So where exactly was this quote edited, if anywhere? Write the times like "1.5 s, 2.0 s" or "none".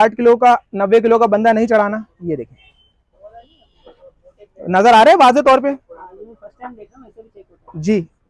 none

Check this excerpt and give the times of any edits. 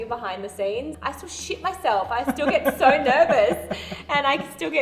1.0 s

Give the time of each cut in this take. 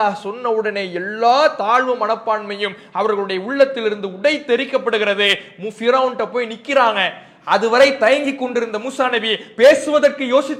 none

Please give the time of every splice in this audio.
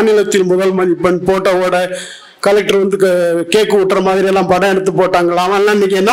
none

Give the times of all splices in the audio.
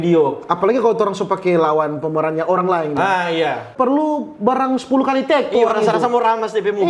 3.7 s

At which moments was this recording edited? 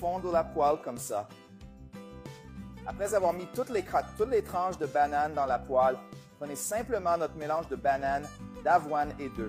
none

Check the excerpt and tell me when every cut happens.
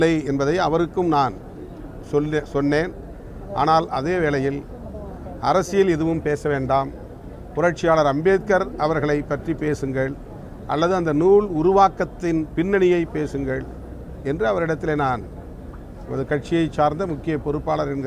none

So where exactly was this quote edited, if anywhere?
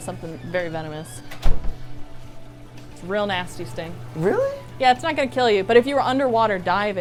none

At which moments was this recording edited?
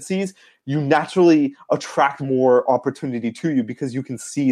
none

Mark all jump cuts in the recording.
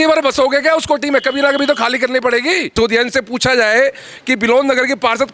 2.7 s

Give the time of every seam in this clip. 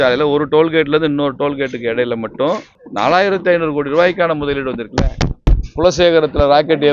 2.8 s, 5.4 s

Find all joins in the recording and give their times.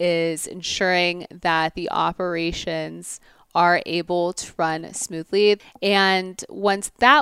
5.6 s

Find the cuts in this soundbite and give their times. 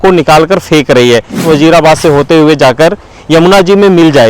1.4 s

